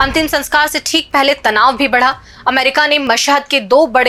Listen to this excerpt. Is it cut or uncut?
uncut